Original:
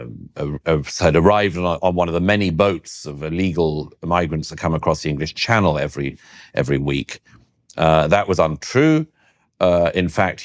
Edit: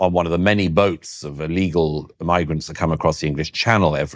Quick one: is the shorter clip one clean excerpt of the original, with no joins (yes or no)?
yes